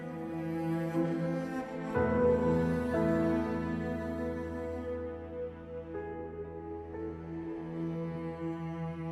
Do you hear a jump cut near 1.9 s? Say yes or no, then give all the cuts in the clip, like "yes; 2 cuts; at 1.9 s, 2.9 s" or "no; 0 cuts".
yes; 1 cut; at 1.9 s